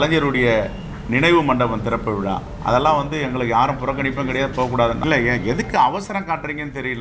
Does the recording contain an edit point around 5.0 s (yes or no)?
yes